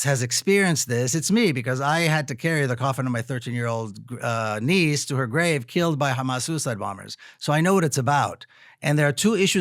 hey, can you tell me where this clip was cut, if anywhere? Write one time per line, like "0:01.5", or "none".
none